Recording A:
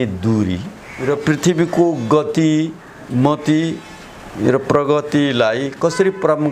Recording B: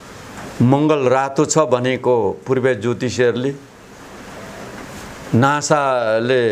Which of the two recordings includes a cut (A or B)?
A